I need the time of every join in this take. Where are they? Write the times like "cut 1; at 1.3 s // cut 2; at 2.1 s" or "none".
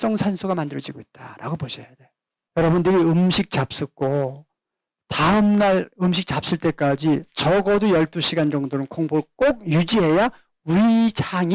cut 1; at 2.4 s